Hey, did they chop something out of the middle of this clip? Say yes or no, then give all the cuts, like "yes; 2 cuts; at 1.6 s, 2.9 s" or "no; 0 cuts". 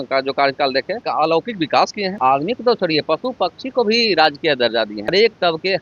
yes; 3 cuts; at 1.0 s, 2.2 s, 5.1 s